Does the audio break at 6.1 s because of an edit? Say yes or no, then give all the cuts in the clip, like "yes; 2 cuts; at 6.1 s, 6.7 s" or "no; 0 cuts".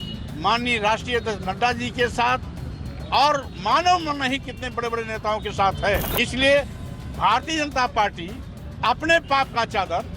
yes; 1 cut; at 6.1 s